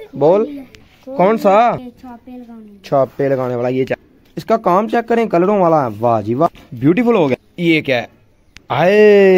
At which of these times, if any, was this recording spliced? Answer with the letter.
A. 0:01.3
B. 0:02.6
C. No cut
C